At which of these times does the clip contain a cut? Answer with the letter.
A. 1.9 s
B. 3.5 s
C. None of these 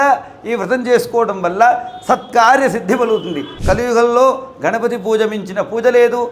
B